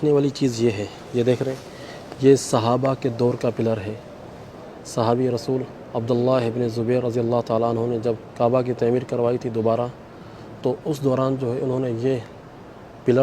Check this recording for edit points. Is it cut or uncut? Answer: cut